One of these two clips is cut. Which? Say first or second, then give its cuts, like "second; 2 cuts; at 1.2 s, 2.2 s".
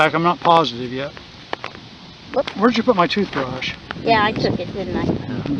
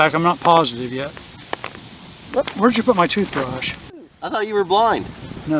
second; 1 cut; at 4.0 s